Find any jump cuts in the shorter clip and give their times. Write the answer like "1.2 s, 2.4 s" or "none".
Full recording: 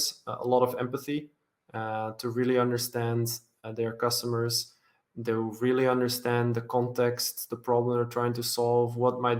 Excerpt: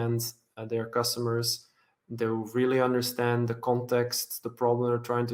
none